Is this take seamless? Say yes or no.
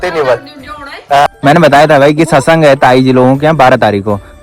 no